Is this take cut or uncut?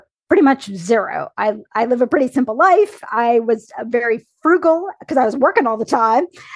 uncut